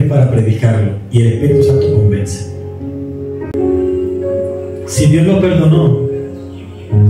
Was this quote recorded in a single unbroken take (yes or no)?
no